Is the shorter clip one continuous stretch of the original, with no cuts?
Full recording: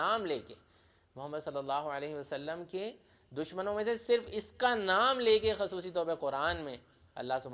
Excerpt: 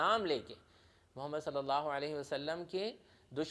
yes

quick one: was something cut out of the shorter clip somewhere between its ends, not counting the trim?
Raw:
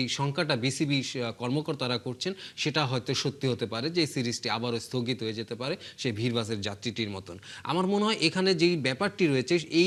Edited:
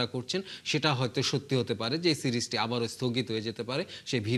no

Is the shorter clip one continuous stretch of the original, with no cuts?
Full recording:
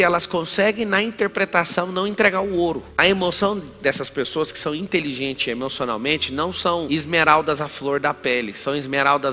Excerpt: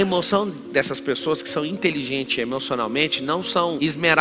yes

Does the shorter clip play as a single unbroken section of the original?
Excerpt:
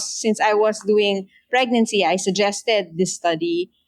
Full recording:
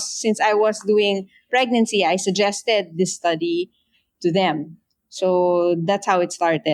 yes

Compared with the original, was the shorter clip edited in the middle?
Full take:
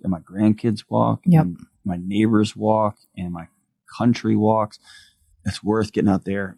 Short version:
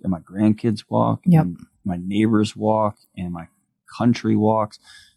no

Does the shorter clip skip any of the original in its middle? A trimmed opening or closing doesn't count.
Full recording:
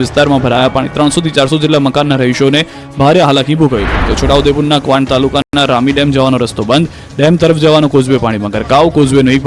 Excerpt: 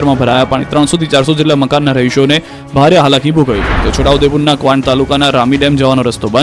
yes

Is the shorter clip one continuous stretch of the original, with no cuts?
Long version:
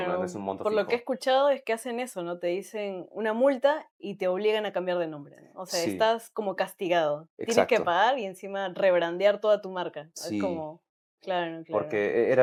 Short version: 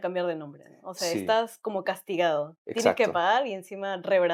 yes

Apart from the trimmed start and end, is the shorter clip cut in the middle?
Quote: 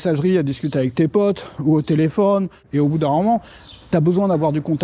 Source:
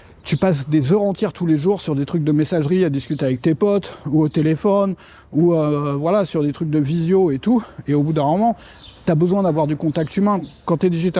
yes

